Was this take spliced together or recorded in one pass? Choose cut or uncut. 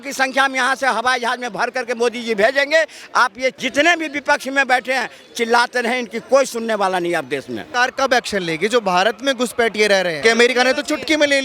cut